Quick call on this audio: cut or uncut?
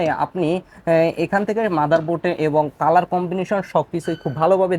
uncut